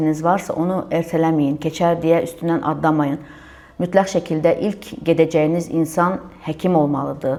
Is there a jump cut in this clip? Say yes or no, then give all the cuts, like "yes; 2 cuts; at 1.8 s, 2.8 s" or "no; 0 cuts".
no; 0 cuts